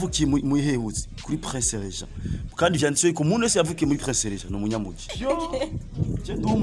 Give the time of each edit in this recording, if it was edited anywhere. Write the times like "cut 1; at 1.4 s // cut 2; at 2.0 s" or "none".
cut 1; at 5.0 s